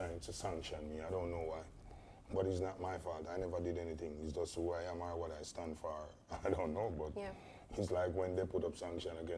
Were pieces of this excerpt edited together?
no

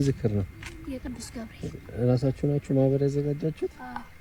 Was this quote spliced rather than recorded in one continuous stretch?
no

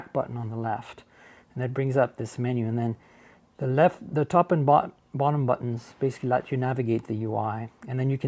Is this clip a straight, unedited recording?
yes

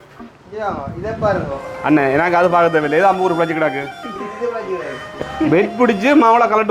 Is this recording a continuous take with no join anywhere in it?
no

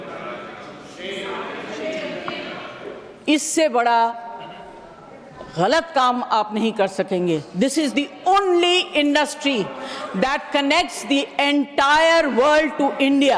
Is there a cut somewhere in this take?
no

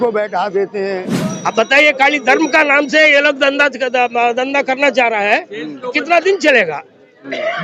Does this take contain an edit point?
yes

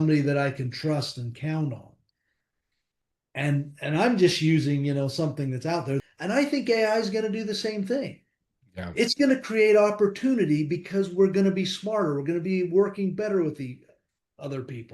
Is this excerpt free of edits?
no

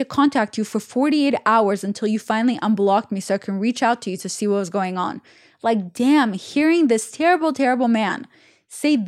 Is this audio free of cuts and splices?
yes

